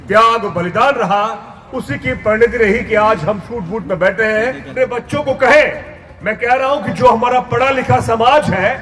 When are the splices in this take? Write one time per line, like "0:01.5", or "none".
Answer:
0:04.6